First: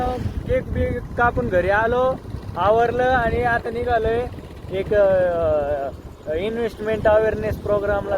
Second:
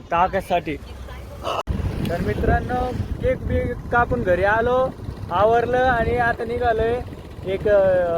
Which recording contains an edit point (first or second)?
second